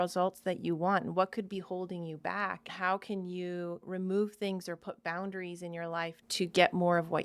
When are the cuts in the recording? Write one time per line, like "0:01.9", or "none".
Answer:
0:02.7
0:03.8
0:06.2